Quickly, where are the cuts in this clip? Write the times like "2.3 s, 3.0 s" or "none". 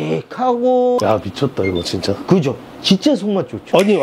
1.0 s